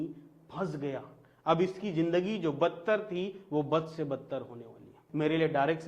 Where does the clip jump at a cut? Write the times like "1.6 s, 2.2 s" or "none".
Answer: 4.9 s